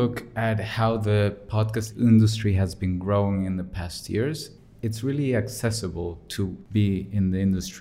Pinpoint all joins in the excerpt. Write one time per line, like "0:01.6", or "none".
0:01.9
0:04.6
0:06.6